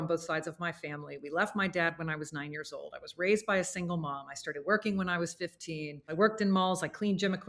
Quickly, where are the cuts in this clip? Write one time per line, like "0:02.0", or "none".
0:06.0